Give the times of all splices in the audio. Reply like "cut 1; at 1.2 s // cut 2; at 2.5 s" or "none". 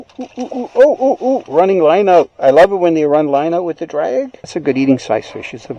cut 1; at 4.4 s